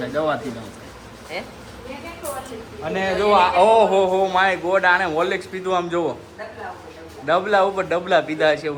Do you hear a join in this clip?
no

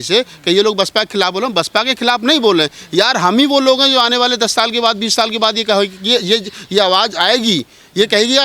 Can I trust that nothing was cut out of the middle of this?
yes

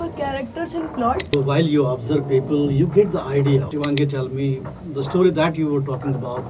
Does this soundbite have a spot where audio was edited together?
yes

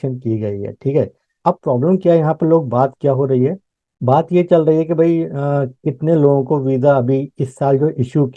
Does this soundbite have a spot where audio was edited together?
yes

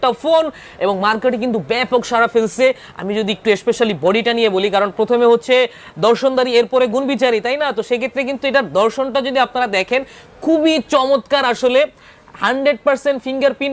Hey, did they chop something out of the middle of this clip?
no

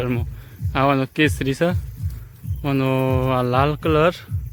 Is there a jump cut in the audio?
no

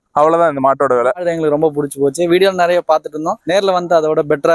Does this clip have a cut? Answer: yes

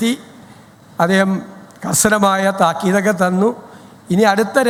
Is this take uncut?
yes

